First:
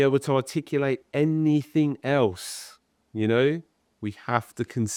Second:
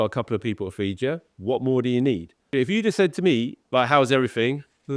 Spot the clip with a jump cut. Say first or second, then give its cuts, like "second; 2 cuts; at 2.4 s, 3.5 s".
second; 2 cuts; at 2.4 s, 3.6 s